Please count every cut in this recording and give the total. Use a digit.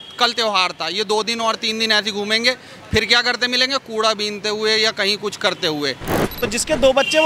1